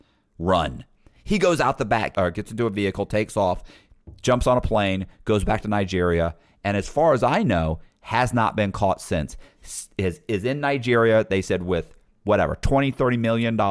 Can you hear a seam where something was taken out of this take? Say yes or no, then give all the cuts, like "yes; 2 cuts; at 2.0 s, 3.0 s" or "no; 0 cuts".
yes; 1 cut; at 2.1 s